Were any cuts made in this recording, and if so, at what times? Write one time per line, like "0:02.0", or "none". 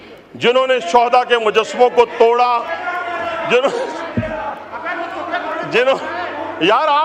none